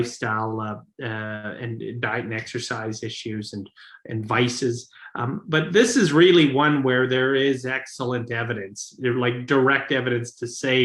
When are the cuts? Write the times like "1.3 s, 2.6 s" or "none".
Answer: none